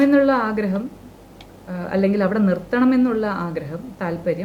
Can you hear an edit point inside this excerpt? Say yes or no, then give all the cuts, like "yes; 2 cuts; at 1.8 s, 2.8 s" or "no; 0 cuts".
no; 0 cuts